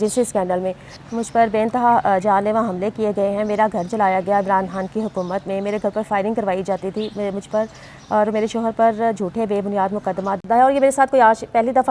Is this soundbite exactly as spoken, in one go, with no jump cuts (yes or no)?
no